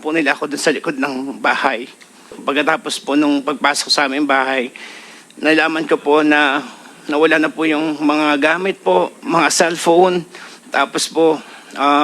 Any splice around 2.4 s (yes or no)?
yes